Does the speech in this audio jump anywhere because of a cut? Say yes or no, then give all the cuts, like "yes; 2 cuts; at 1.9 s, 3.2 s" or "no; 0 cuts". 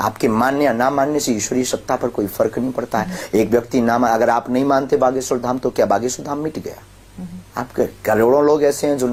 no; 0 cuts